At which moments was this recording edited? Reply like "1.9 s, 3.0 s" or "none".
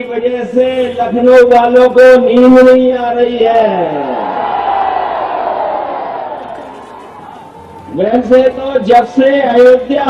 none